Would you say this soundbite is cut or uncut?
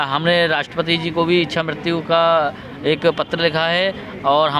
uncut